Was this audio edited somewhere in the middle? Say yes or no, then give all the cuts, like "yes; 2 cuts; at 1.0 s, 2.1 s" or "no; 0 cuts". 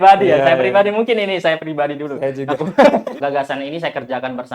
yes; 1 cut; at 3.1 s